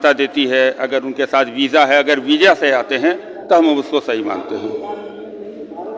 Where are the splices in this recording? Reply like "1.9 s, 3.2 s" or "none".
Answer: none